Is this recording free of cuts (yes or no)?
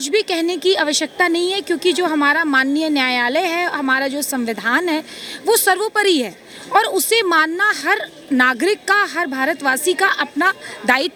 yes